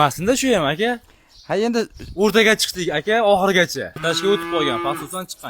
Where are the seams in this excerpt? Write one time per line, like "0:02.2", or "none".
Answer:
0:04.0